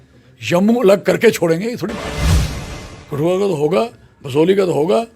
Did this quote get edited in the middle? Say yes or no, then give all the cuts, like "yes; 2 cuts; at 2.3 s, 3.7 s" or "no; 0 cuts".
yes; 2 cuts; at 2.0 s, 2.9 s